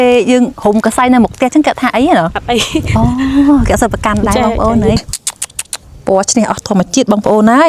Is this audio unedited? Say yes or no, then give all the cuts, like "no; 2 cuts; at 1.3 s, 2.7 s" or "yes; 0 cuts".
no; 1 cut; at 5.0 s